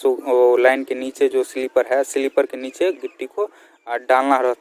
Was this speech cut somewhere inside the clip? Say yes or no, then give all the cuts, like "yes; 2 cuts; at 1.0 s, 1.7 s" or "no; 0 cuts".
no; 0 cuts